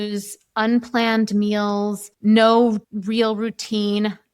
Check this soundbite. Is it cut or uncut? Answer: cut